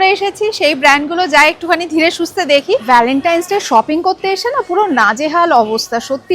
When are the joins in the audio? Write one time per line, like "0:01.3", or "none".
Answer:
0:02.8